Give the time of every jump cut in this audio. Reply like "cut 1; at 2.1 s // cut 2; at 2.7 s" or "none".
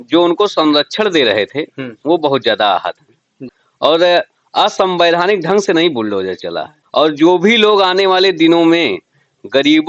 cut 1; at 3.4 s // cut 2; at 6.7 s